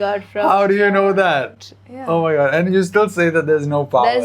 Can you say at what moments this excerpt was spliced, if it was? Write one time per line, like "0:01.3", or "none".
none

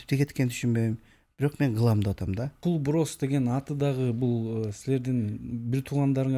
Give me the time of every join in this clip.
0:02.5

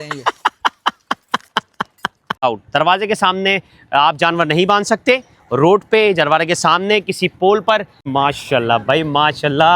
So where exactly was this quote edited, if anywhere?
0:02.3
0:08.1

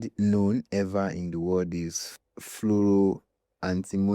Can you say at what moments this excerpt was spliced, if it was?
none

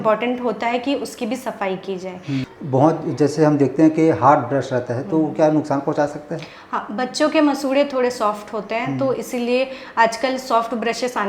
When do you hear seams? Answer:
0:02.5

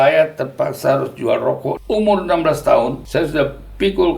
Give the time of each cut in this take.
0:01.8
0:03.0

